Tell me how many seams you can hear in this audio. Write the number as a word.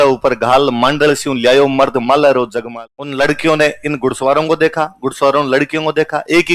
one